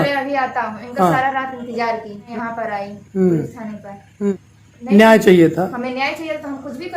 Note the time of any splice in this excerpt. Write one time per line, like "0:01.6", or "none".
0:02.2
0:04.3